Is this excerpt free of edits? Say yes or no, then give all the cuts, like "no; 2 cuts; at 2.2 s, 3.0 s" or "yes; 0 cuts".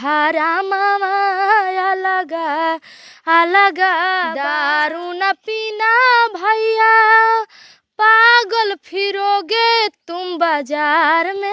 no; 1 cut; at 4.4 s